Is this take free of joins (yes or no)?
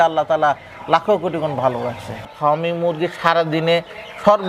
no